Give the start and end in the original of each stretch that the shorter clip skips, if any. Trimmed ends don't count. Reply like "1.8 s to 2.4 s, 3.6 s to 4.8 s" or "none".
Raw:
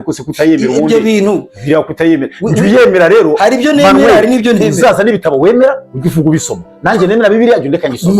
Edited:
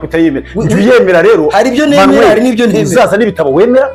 none